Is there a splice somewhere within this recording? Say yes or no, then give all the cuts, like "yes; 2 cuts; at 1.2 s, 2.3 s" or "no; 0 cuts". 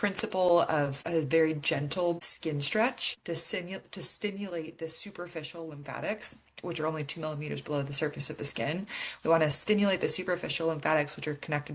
yes; 3 cuts; at 1.0 s, 2.3 s, 3.1 s